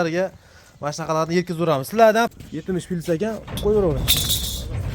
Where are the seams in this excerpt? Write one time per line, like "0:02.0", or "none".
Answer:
0:02.3